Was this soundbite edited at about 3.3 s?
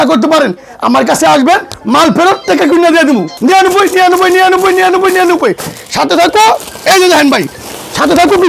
yes; 1 cut; at 3.3 s

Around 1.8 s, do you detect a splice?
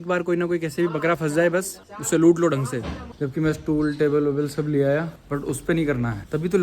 no; 1 cut; at 3.1 s

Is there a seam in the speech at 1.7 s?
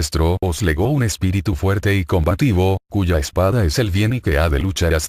no; 0 cuts

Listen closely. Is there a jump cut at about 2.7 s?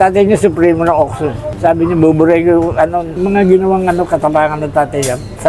no; 0 cuts

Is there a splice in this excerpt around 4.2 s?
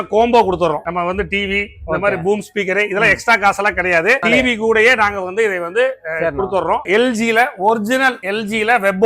yes; 2 cuts; at 4.2 s, 6.9 s

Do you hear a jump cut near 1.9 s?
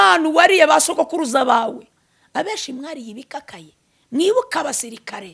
yes; 1 cut; at 1.9 s

